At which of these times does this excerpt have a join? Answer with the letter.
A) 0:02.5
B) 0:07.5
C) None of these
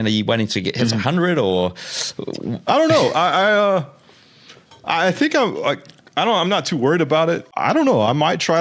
B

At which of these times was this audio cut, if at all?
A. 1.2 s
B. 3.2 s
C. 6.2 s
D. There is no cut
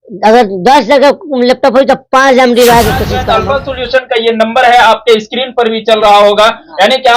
B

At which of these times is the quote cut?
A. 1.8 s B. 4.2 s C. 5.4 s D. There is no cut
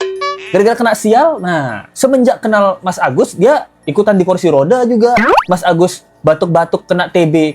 A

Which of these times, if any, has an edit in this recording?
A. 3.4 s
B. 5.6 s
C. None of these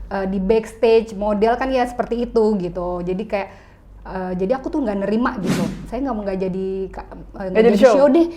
B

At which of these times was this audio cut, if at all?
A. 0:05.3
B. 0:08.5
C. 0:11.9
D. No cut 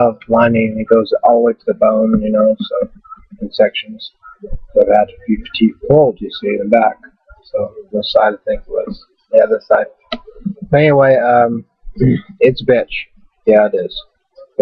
C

